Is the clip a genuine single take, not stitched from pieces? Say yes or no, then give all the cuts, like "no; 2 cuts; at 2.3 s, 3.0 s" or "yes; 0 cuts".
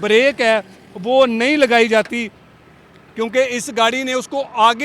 yes; 0 cuts